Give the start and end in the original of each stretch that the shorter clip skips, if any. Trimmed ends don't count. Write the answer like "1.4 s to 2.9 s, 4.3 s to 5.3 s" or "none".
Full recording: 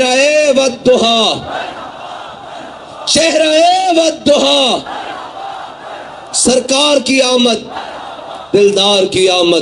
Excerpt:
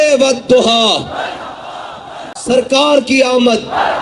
2.9 s to 6.5 s